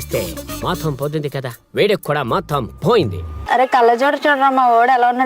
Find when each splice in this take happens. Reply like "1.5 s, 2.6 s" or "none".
3.4 s